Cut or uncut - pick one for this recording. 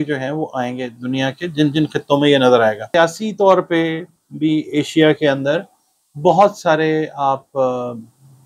cut